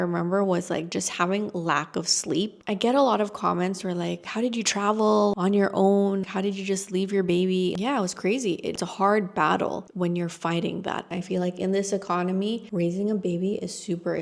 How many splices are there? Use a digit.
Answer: 3